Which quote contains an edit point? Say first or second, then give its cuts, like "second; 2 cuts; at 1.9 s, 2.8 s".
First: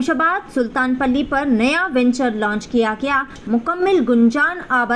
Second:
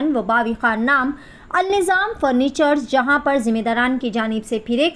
first; 1 cut; at 3.4 s